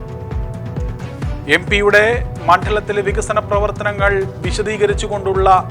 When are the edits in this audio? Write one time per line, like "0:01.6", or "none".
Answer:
0:01.0